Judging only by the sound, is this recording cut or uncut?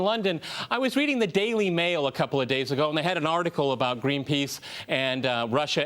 cut